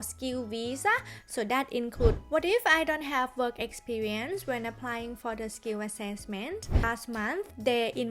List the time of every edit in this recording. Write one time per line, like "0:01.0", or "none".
0:02.2
0:06.8

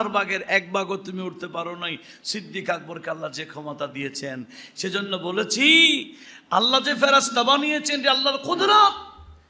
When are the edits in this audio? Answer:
none

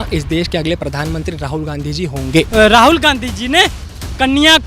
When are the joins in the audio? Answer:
0:02.5

